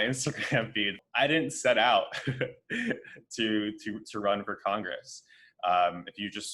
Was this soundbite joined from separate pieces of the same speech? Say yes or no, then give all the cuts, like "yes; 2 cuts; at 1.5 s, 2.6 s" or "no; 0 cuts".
yes; 1 cut; at 1.0 s